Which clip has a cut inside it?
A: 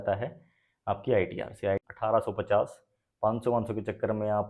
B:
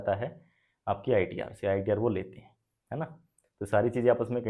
A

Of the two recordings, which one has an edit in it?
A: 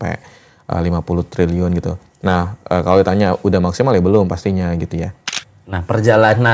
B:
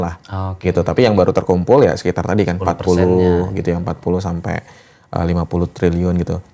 A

